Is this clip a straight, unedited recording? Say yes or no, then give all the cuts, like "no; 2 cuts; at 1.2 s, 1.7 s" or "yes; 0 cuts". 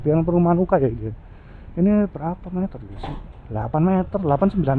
yes; 0 cuts